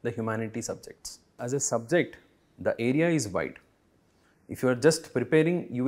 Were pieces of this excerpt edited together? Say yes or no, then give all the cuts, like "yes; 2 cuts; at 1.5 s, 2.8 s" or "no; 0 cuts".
yes; 1 cut; at 1.4 s